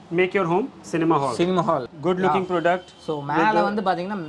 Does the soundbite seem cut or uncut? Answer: cut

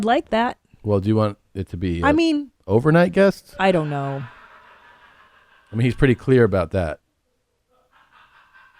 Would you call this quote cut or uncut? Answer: cut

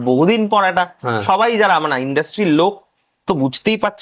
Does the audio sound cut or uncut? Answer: uncut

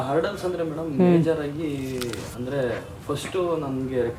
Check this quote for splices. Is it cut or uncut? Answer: uncut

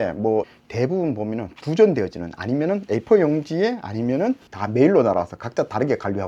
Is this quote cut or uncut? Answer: uncut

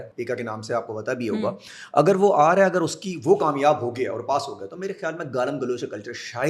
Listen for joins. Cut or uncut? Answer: uncut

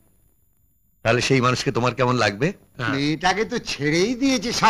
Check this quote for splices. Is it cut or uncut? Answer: cut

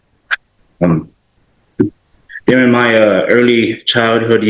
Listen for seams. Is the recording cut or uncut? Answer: cut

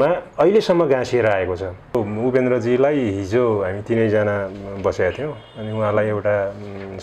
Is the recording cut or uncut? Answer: cut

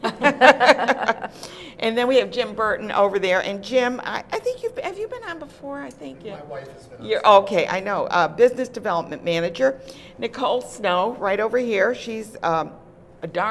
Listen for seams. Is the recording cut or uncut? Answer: cut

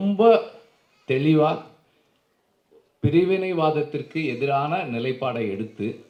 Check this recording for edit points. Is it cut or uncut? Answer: uncut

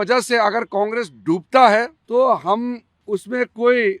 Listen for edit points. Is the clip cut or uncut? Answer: cut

